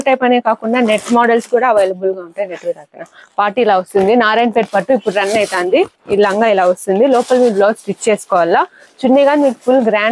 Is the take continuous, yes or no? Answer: yes